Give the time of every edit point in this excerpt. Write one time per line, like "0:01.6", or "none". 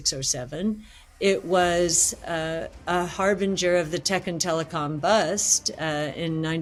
none